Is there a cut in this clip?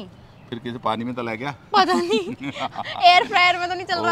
no; 0 cuts

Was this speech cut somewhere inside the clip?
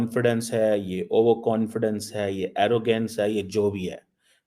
no; 0 cuts

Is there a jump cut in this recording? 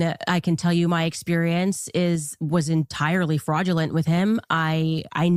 no; 0 cuts

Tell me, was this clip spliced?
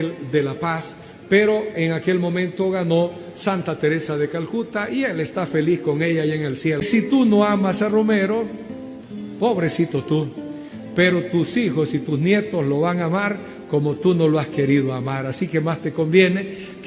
yes; 1 cut; at 6.9 s

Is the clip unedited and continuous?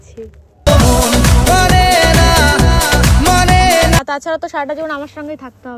no; 1 cut; at 4.0 s

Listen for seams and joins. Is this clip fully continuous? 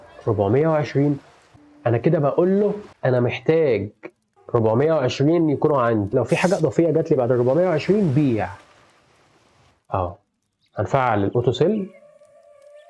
yes; 0 cuts

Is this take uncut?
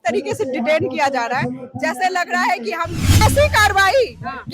no; 1 cut; at 3.2 s

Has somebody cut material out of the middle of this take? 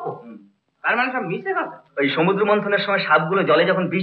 yes; 1 cut; at 1.8 s

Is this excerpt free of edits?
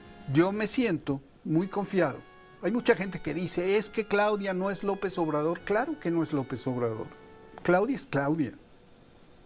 yes; 0 cuts

